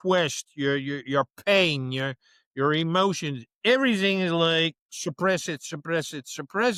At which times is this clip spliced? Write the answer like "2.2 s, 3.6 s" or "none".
none